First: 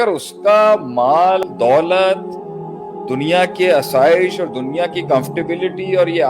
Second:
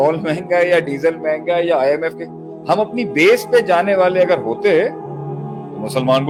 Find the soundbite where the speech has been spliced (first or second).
first